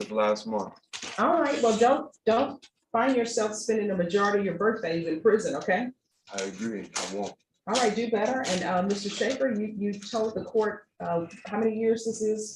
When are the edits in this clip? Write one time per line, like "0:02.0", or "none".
none